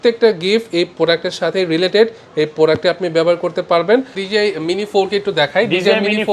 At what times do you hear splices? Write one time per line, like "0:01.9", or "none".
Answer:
0:04.2